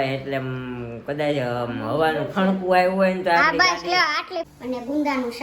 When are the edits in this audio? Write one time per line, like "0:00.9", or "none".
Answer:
0:04.5